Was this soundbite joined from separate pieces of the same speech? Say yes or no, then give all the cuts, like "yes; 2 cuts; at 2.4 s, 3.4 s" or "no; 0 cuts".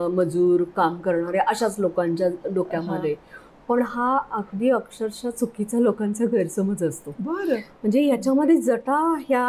no; 0 cuts